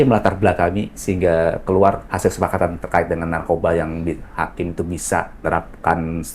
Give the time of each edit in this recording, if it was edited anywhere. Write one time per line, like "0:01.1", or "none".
0:00.9
0:02.0
0:05.4